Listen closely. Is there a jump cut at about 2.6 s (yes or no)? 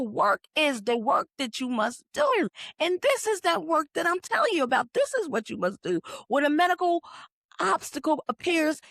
yes